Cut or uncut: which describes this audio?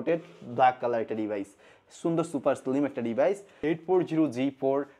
cut